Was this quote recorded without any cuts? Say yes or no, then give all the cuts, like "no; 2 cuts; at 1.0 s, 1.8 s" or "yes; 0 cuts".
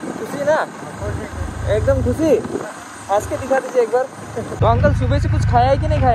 no; 1 cut; at 4.2 s